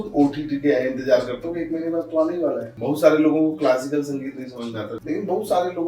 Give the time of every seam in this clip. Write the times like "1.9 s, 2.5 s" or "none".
2.7 s, 5.0 s